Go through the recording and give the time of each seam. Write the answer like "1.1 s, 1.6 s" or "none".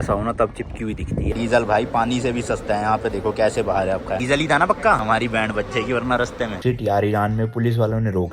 1.3 s, 5.0 s, 6.6 s